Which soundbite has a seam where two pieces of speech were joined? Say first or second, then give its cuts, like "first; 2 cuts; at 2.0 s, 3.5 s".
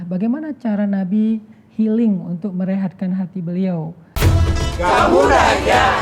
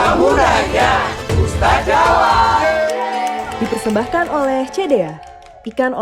first; 1 cut; at 4.0 s